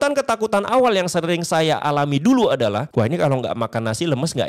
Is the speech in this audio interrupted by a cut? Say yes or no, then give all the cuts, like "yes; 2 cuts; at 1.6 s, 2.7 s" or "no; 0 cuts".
yes; 1 cut; at 2.9 s